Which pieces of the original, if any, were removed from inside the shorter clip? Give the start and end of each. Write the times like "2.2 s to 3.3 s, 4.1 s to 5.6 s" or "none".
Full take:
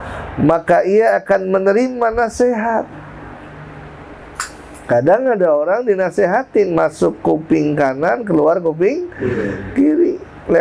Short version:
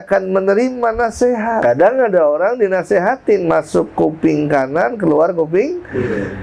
2.8 s to 4.9 s